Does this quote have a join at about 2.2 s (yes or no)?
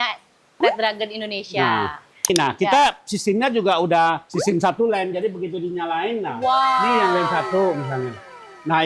yes